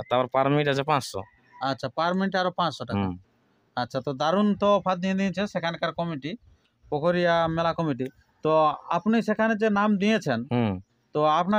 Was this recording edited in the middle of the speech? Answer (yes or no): no